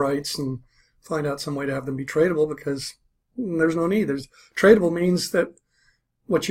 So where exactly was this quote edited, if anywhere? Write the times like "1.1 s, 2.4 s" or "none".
1.8 s

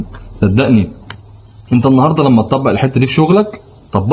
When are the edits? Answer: none

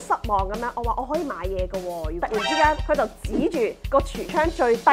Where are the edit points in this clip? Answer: 2.2 s

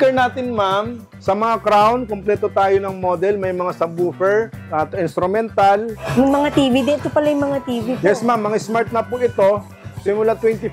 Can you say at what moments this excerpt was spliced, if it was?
1.0 s, 4.6 s, 6.0 s

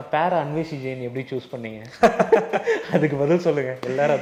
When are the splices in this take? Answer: none

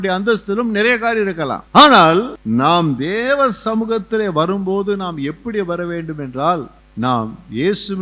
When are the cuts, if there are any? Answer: 1.6 s, 2.4 s, 6.8 s

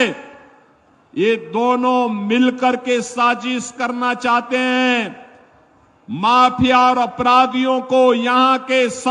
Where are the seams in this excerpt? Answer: none

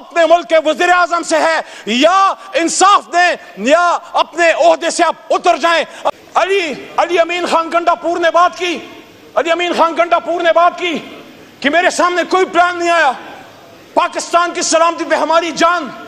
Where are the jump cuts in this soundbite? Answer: 6.0 s

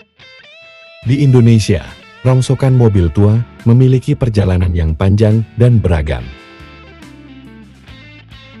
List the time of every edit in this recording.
1.0 s

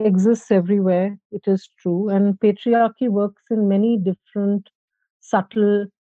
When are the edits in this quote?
none

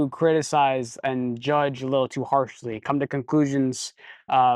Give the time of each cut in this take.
none

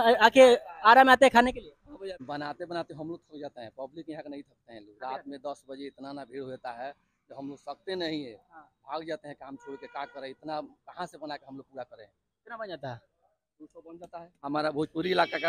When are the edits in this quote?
2.2 s, 14.3 s

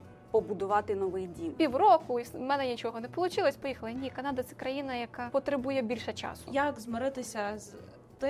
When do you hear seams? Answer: 1.5 s, 5.2 s, 6.4 s

